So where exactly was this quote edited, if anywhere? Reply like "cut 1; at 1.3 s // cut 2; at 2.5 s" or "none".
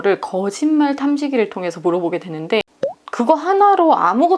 cut 1; at 2.6 s